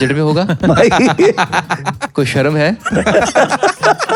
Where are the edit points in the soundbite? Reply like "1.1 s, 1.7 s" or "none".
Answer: none